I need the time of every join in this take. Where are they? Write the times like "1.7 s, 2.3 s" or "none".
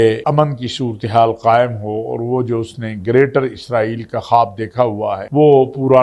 none